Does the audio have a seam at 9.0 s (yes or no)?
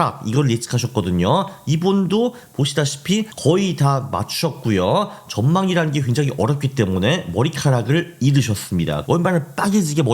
yes